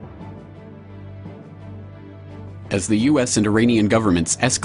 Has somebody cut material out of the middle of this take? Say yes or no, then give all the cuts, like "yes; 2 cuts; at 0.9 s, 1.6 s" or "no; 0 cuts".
no; 0 cuts